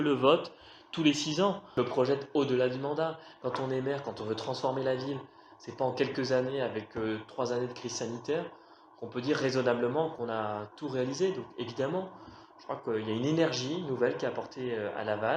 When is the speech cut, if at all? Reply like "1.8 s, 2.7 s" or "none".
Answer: 1.7 s, 10.1 s